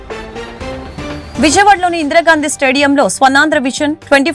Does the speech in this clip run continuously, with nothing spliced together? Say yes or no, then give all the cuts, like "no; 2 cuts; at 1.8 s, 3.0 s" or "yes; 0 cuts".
no; 1 cut; at 1.3 s